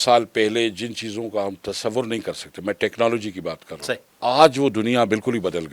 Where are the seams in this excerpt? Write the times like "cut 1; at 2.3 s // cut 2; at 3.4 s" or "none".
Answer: cut 1; at 4.1 s